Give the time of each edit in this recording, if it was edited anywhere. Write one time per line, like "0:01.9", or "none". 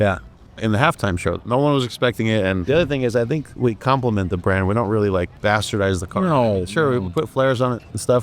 0:01.4
0:02.6
0:05.3